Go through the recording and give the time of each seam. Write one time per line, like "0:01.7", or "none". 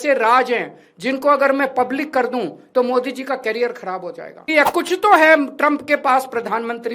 0:04.5